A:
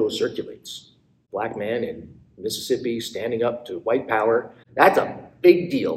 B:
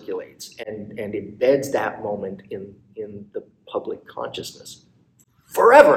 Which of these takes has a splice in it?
A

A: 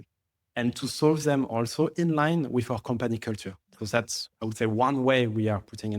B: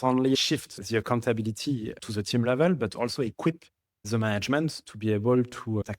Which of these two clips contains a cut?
A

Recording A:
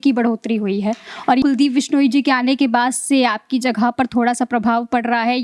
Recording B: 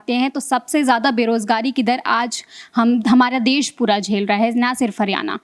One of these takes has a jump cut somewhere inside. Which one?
A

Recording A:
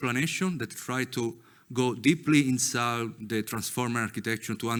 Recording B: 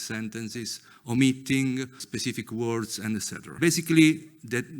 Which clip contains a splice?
B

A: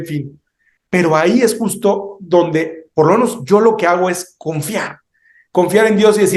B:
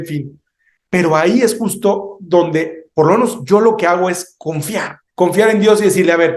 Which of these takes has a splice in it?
B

